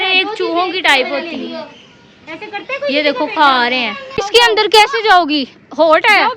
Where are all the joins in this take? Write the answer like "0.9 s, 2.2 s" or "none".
none